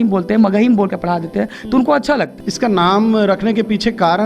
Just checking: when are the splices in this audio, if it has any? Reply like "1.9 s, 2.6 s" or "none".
2.4 s